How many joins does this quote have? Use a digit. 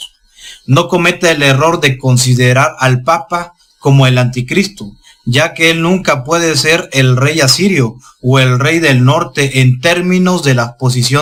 0